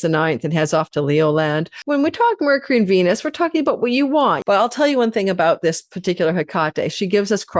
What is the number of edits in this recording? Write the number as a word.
two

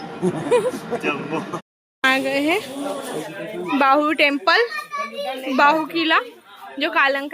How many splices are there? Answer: one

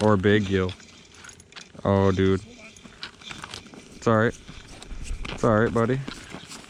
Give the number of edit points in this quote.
zero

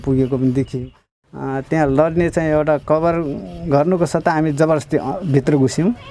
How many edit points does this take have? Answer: one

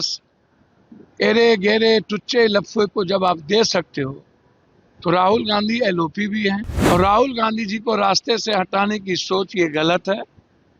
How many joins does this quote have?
one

